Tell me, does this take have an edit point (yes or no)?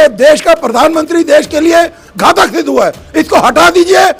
no